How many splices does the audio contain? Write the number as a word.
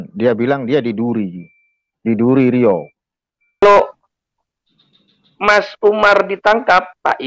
one